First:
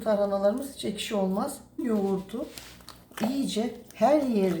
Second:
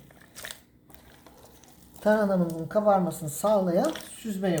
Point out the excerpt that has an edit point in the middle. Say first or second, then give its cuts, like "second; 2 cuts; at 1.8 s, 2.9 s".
first; 1 cut; at 1.8 s